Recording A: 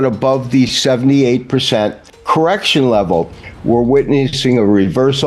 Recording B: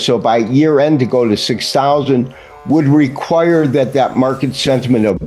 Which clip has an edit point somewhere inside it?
A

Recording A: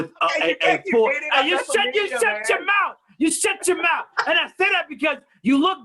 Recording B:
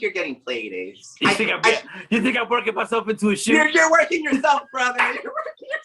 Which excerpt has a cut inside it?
B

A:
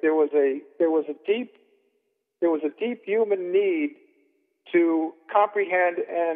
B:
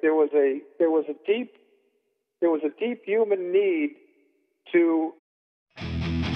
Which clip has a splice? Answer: A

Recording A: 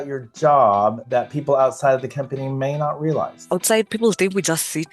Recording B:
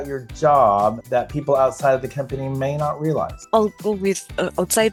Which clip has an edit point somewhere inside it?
A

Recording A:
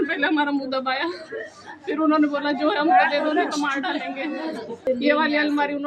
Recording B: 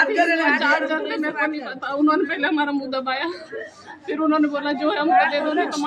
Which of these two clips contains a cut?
A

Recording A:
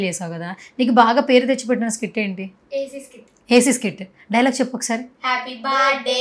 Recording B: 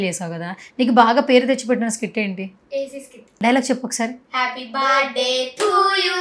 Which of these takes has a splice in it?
B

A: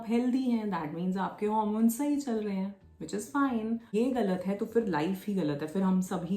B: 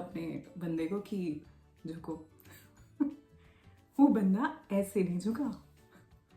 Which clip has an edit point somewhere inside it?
A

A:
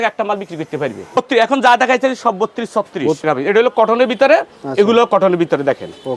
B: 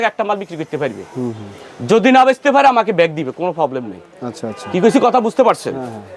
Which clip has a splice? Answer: A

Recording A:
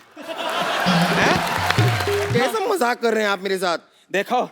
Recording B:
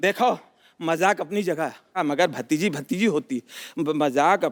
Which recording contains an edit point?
A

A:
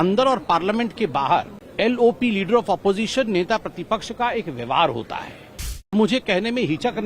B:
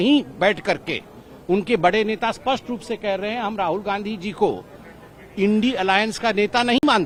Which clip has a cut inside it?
A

